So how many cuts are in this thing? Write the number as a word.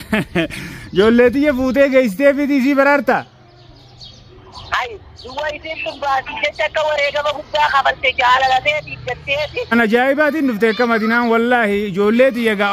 one